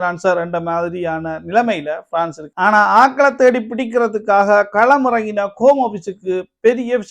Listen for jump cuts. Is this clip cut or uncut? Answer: cut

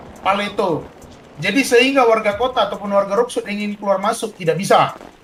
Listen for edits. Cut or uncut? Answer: uncut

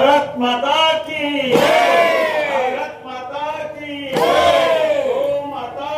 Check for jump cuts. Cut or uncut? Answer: uncut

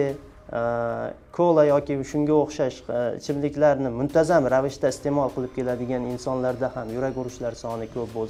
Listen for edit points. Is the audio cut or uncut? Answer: uncut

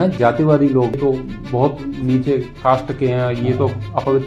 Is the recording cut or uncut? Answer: cut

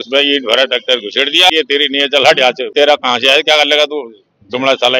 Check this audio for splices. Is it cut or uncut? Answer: cut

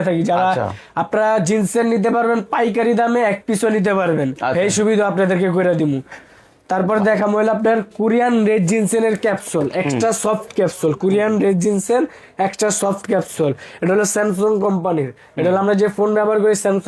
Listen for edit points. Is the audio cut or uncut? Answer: uncut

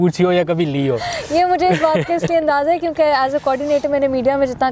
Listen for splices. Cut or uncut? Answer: uncut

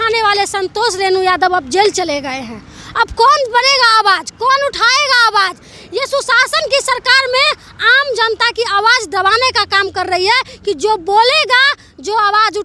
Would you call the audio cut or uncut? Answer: uncut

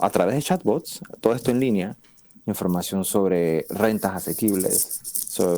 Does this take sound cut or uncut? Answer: uncut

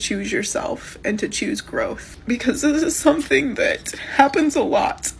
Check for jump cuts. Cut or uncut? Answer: cut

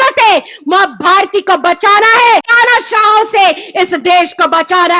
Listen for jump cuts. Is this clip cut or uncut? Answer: cut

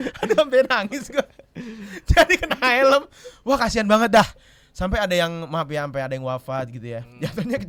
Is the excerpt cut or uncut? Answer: uncut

